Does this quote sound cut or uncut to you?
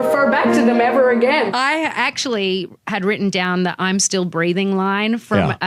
cut